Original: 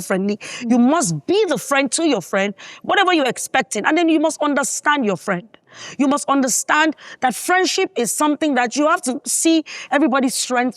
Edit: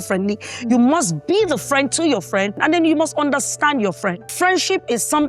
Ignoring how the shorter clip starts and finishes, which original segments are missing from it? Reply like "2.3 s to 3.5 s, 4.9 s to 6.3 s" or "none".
2.6 s to 3.8 s, 5.5 s to 7.4 s